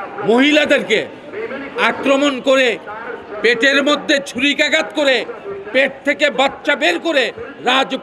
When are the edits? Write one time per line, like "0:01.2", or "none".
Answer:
none